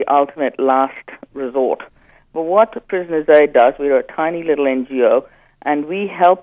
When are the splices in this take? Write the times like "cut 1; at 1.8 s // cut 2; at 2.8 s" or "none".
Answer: cut 1; at 2.1 s